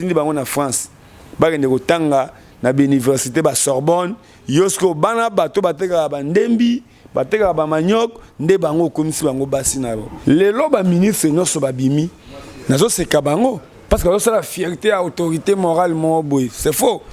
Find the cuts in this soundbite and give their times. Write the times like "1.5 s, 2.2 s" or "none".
10.1 s